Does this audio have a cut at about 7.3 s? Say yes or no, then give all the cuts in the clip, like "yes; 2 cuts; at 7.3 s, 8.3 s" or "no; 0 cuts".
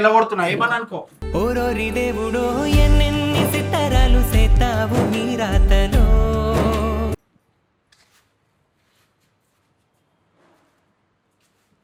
no; 0 cuts